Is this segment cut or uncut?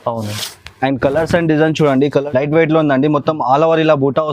cut